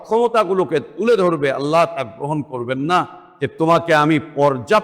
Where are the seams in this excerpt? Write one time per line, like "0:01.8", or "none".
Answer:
0:03.2